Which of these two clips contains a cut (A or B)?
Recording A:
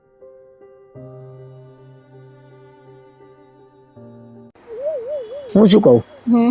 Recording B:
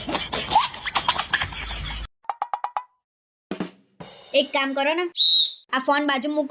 A